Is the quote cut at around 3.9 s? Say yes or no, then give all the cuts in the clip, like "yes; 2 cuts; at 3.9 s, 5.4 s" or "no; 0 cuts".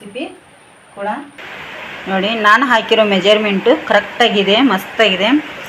no; 1 cut; at 1.4 s